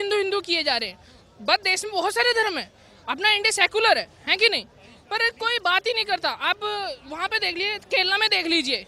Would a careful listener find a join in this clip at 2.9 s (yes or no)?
no